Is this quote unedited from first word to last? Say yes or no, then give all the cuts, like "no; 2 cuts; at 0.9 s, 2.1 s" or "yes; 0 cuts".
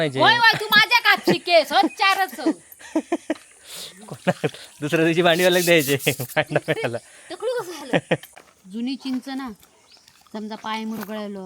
no; 1 cut; at 8.3 s